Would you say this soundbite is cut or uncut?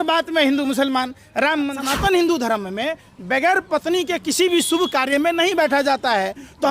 cut